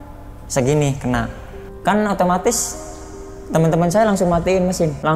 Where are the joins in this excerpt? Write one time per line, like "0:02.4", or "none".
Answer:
0:01.7